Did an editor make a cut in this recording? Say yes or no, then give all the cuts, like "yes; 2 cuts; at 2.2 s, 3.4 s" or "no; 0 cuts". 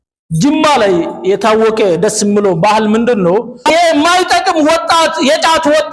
yes; 1 cut; at 3.6 s